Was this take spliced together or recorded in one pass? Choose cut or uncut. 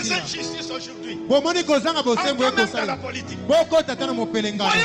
uncut